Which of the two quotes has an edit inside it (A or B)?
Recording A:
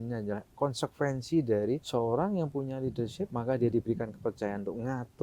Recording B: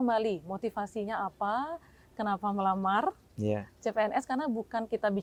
A